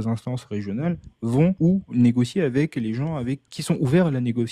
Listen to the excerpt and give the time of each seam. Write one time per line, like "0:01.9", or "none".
0:01.6
0:03.5